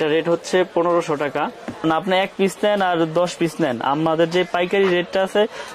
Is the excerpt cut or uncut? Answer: cut